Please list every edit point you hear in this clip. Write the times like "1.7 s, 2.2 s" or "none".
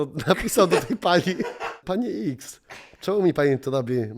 1.7 s